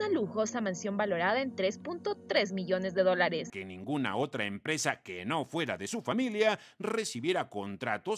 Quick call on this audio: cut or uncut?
cut